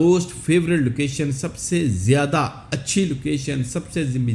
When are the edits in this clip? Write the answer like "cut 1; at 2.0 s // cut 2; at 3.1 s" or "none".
none